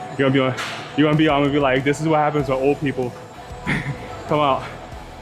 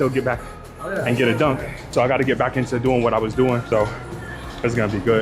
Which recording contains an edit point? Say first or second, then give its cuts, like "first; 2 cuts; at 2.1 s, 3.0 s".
second; 2 cuts; at 1.9 s, 3.7 s